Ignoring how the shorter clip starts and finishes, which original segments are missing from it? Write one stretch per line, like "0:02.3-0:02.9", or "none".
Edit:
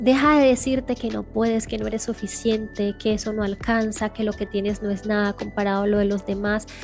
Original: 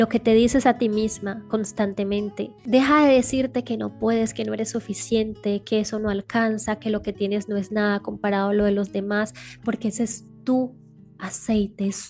none

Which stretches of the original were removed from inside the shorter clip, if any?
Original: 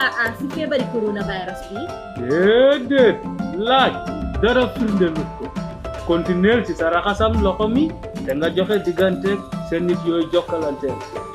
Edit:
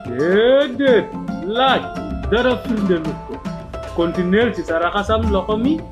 none

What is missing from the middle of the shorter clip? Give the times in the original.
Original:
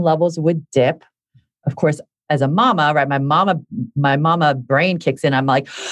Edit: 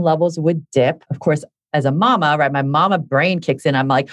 0:01.1-0:01.6
0:03.6-0:04.6

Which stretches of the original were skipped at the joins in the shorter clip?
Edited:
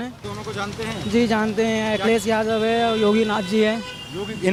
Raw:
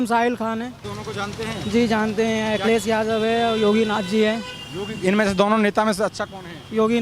none

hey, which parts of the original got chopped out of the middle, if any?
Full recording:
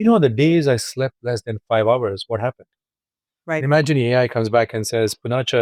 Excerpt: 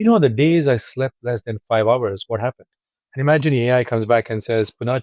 0:03.2-0:03.6

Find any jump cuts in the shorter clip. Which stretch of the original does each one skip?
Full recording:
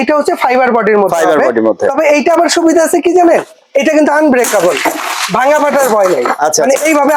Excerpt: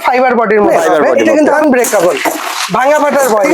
0:01.6-0:03.8

